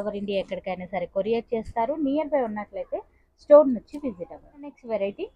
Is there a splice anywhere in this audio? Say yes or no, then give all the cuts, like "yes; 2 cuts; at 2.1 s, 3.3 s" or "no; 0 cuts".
no; 0 cuts